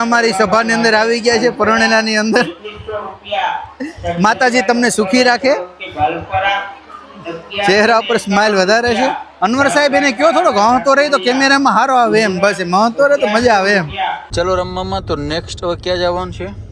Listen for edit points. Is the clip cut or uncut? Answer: uncut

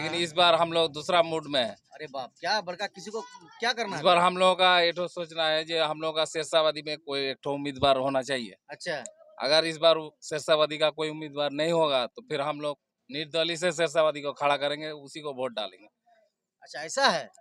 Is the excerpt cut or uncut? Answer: uncut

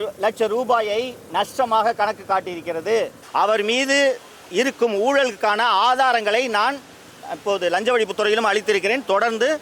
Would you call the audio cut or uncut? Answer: cut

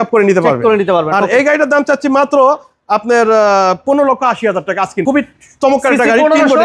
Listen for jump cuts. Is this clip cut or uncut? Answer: cut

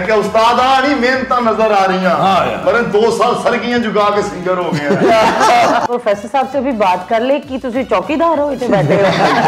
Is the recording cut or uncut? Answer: cut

